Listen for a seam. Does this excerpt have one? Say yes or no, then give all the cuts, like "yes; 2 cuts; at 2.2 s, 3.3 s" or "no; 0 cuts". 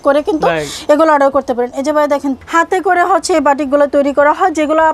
yes; 1 cut; at 2.4 s